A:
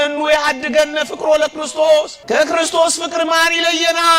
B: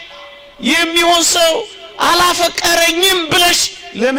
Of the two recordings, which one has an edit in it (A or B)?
A